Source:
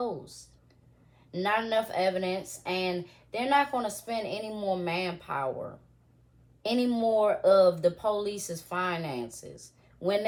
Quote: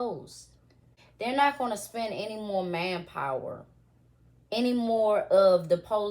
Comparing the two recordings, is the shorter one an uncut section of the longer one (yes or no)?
no